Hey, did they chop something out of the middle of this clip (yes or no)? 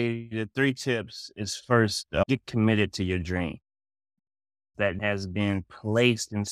yes